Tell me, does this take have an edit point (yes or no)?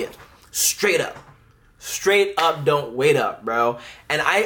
no